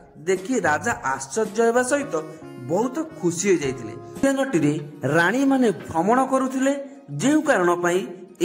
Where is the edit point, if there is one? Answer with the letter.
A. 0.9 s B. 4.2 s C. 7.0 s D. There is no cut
B